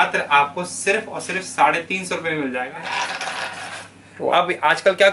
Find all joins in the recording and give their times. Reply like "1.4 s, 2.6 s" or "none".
2.7 s